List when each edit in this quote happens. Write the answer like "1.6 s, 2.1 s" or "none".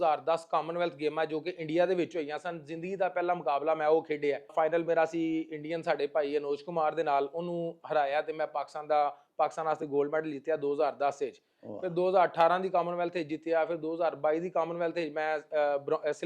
4.5 s